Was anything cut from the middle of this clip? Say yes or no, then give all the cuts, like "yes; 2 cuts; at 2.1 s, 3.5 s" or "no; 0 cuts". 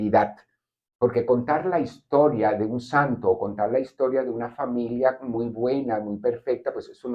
no; 0 cuts